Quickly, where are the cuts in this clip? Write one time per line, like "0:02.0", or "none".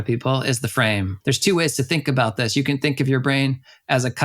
0:01.1